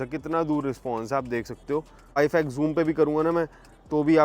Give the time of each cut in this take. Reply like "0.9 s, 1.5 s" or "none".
2.2 s